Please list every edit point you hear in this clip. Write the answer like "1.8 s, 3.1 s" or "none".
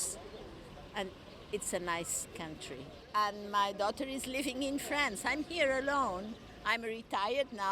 3.0 s